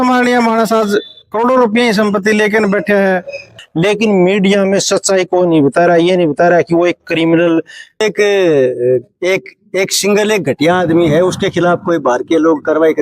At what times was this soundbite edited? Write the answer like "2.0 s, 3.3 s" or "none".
3.6 s, 8.0 s